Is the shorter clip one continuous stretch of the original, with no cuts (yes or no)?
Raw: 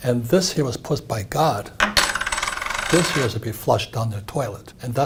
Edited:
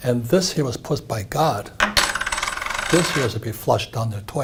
yes